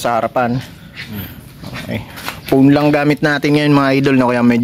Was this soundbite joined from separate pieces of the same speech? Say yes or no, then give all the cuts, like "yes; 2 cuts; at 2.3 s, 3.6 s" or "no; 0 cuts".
no; 0 cuts